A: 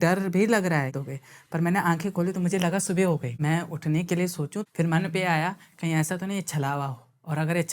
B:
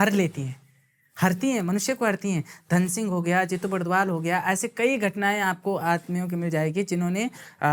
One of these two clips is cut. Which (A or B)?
A